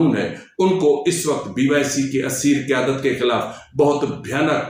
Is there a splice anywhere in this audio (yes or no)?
no